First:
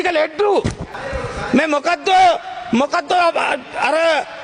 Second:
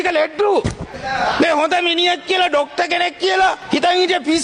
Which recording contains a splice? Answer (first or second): second